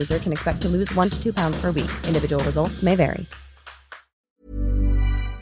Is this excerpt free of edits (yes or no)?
no